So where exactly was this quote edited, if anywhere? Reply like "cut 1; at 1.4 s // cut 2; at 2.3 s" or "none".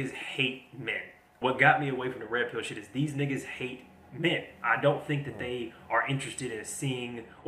cut 1; at 1.3 s